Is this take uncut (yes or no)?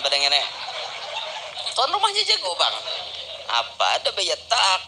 no